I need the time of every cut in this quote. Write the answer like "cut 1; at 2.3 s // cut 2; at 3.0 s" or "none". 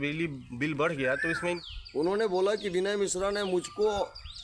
cut 1; at 1.7 s